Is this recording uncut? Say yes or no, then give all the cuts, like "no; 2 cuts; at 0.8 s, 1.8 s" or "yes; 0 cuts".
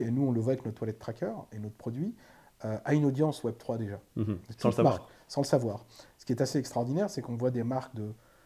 yes; 0 cuts